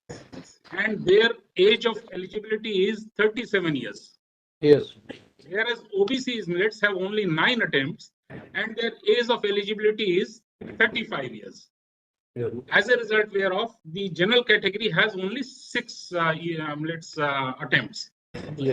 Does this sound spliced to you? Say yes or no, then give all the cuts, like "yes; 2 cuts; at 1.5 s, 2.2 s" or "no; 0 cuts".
no; 0 cuts